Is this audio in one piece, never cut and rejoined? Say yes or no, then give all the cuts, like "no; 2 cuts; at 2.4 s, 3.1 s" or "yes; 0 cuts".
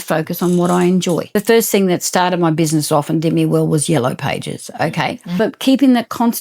no; 2 cuts; at 1.3 s, 5.4 s